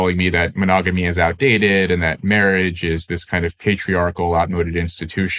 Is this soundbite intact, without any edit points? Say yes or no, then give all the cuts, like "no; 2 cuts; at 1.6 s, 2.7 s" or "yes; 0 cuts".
yes; 0 cuts